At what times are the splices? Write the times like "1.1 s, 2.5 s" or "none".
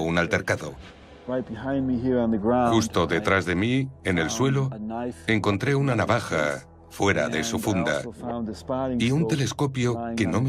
none